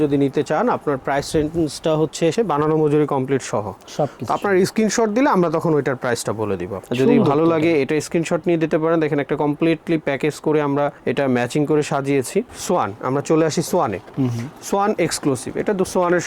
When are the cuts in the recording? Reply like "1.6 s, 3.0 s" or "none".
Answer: 2.3 s, 6.8 s, 12.5 s